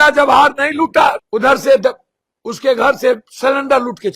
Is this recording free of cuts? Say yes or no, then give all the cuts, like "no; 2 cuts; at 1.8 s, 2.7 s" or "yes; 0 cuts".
no; 1 cut; at 1.2 s